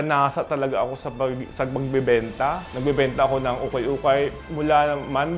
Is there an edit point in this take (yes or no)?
yes